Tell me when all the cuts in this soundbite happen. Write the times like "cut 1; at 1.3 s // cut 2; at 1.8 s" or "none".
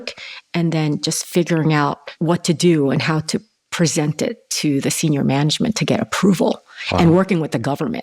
cut 1; at 2.1 s